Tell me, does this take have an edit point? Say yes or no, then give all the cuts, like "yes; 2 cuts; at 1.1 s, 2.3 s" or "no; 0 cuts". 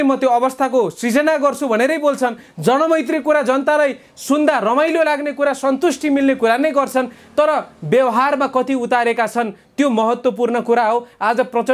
no; 0 cuts